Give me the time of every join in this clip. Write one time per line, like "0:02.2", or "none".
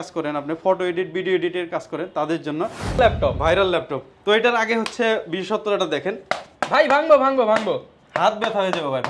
0:03.0

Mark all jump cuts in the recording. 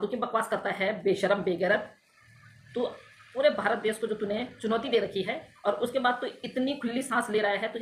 none

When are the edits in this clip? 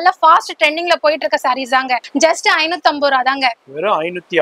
0:02.0

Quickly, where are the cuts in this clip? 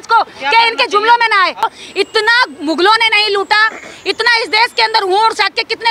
0:01.6

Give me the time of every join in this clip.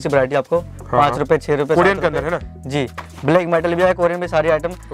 none

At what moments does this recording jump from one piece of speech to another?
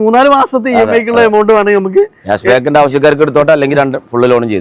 none

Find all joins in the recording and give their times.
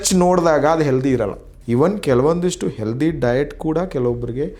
0:01.5

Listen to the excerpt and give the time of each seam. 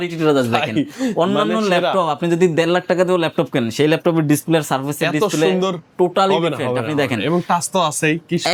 none

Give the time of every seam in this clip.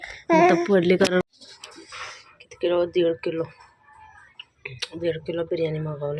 0:01.3

